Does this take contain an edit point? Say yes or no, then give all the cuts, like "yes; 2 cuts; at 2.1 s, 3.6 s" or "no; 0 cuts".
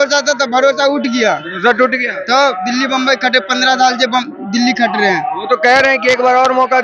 no; 0 cuts